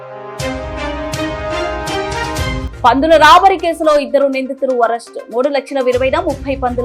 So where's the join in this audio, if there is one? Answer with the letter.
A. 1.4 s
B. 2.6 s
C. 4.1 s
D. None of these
D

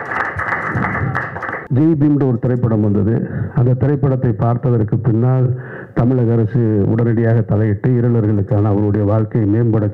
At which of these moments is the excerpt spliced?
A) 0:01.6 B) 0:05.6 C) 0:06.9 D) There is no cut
A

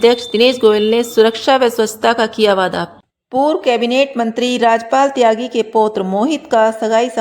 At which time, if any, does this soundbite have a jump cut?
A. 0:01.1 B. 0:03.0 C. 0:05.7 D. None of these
B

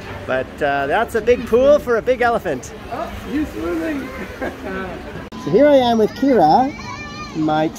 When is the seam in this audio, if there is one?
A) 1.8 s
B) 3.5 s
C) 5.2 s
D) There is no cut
C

